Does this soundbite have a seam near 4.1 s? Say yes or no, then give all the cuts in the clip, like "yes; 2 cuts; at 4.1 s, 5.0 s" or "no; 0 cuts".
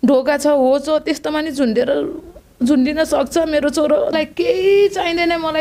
yes; 1 cut; at 4.1 s